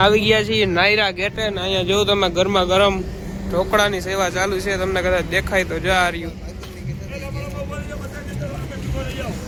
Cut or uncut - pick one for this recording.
uncut